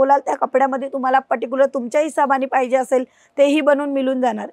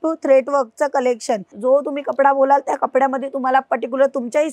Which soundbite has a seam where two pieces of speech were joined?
second; 1 cut; at 1.5 s

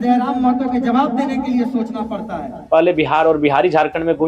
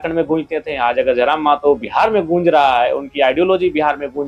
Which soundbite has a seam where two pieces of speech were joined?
first; 1 cut; at 2.5 s

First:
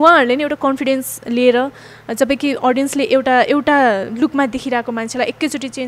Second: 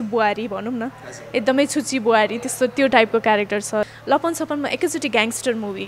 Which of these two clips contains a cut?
second; 1 cut; at 3.9 s

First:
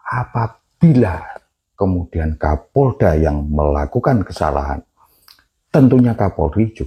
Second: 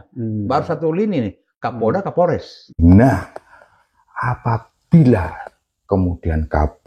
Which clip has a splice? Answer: second; 1 cut; at 2.7 s

